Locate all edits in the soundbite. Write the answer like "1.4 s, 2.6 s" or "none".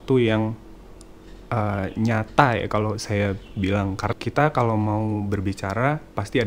4.1 s